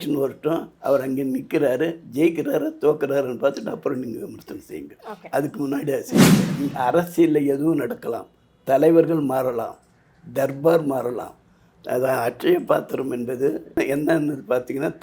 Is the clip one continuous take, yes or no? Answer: no